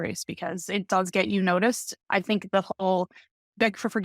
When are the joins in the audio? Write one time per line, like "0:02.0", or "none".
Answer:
0:01.9